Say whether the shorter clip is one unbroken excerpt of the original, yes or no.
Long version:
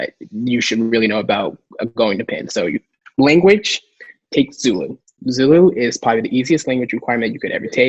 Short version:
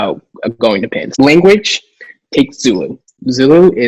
no